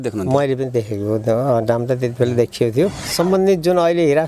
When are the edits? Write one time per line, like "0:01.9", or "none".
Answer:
0:03.1